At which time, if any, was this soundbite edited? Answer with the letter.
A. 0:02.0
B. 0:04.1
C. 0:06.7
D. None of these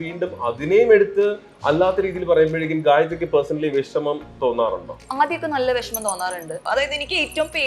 C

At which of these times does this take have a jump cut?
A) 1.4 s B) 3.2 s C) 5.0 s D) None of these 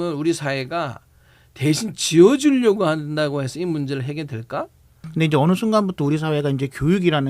C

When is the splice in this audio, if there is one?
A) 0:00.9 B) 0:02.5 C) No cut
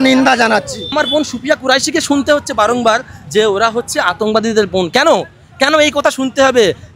A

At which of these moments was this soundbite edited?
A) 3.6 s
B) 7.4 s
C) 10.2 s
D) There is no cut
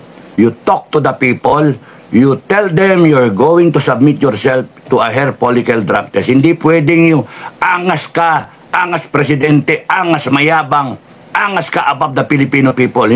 D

